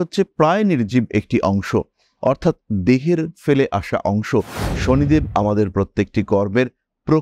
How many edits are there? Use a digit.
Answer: 1